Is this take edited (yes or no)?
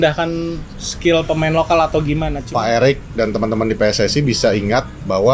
yes